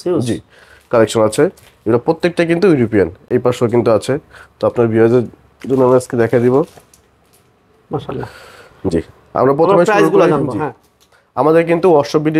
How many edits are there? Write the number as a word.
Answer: zero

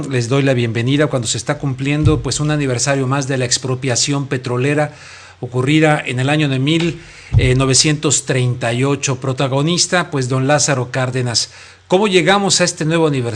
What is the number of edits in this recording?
zero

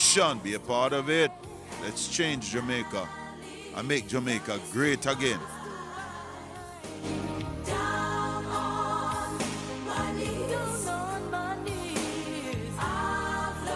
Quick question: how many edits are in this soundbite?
zero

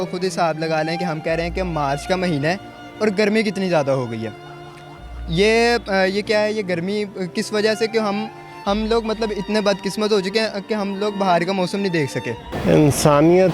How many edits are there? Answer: one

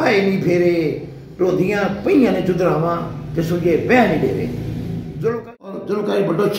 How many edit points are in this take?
one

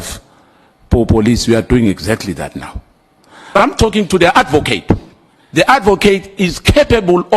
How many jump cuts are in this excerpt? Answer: one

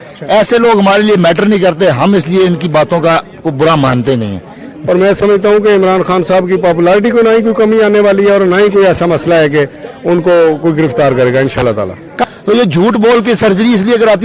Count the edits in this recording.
two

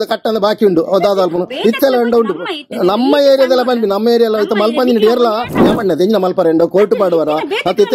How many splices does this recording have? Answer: one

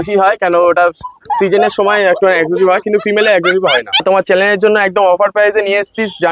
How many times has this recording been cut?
one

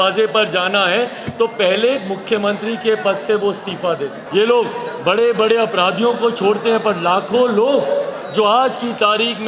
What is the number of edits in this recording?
one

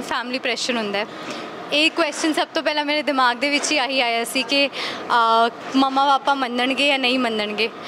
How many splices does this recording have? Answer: zero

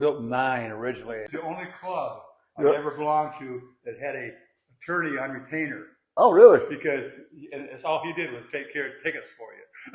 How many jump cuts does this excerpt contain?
one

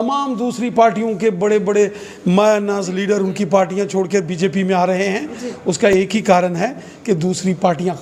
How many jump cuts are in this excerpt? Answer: zero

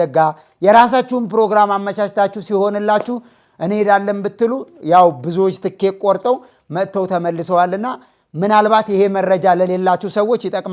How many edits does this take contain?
zero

